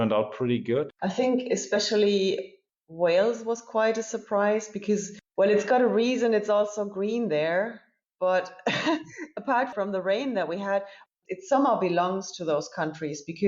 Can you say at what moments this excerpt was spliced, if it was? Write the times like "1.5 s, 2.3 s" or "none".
0.9 s, 9.7 s